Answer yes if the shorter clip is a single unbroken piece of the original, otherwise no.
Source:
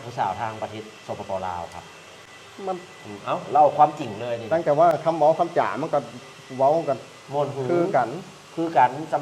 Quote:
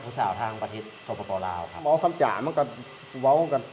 no